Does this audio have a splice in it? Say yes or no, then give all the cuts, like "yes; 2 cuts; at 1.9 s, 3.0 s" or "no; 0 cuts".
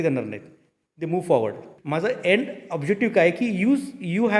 yes; 1 cut; at 1.7 s